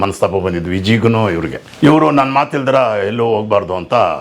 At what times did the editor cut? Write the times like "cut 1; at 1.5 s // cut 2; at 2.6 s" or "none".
cut 1; at 1.8 s